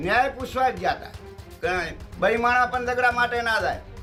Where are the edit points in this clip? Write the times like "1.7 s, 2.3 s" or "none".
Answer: none